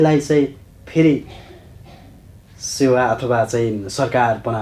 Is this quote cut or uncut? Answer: uncut